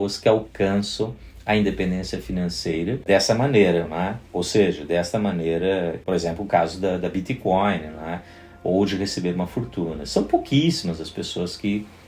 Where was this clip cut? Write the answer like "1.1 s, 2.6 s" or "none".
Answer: 3.0 s, 6.0 s

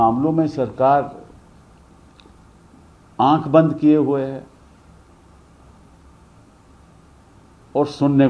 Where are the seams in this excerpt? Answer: none

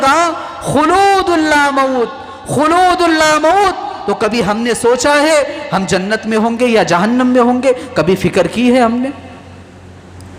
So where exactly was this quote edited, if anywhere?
none

